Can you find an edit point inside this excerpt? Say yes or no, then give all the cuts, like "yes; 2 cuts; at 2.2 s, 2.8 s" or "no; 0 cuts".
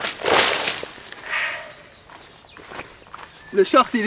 yes; 1 cut; at 1.7 s